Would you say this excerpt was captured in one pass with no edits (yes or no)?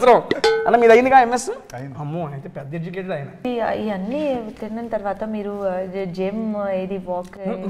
no